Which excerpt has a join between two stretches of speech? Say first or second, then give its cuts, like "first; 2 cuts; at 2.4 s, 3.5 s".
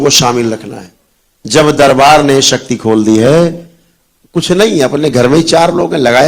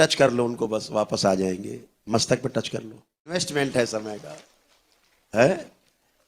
second; 1 cut; at 3.5 s